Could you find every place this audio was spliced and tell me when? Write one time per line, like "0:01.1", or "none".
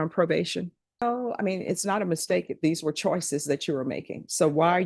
0:01.0

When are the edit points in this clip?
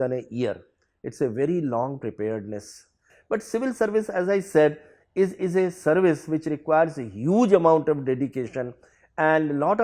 0:03.1

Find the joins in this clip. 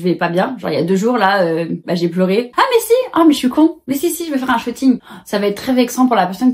0:02.5
0:05.0

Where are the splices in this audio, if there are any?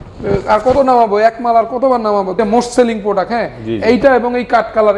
0:02.3

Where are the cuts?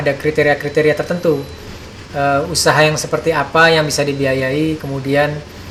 none

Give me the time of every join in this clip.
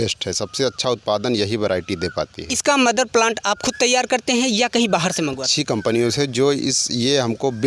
0:02.5
0:05.5

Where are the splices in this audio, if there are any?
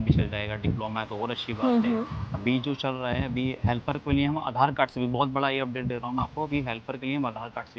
none

